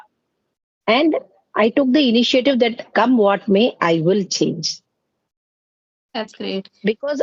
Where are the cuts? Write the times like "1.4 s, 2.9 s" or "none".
none